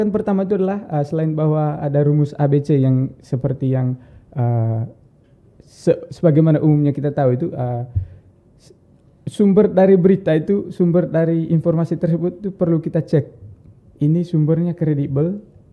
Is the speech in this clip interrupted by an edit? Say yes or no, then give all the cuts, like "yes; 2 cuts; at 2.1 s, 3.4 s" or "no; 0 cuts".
no; 0 cuts